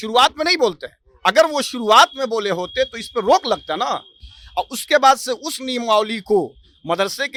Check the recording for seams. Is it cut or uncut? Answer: uncut